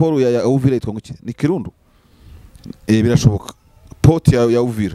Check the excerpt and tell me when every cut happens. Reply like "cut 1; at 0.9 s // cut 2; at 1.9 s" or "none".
none

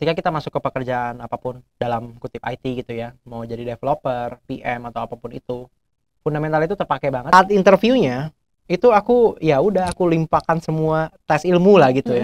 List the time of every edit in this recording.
cut 1; at 7.3 s

